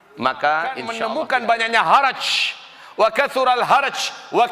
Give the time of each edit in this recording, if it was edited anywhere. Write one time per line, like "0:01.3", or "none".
0:00.9